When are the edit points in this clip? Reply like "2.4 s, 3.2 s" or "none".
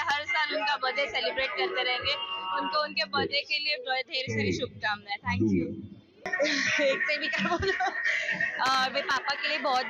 5.9 s